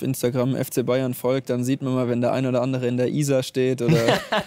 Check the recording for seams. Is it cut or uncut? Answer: uncut